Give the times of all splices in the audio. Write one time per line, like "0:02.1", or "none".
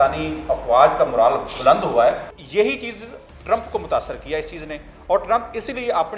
0:02.3